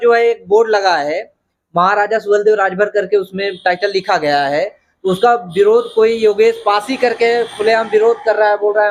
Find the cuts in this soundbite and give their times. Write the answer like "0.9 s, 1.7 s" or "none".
none

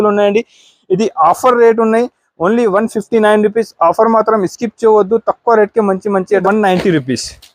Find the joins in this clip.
6.4 s

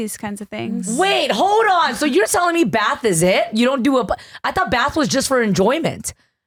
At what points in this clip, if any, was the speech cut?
none

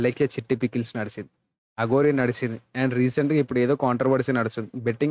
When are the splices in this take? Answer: none

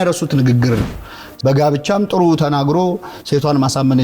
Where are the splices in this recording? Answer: 1.0 s

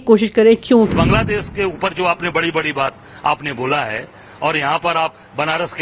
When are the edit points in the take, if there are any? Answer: 0.9 s

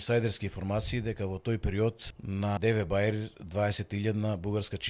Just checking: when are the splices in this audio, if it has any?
2.5 s

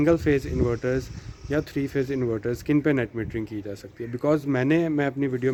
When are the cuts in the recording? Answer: none

